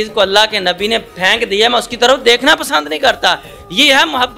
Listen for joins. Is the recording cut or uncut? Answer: uncut